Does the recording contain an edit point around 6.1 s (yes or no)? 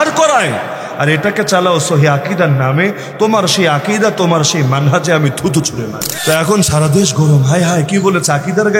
yes